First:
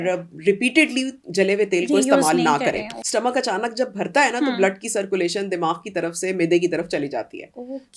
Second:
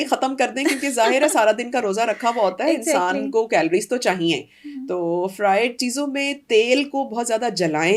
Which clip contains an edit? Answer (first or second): first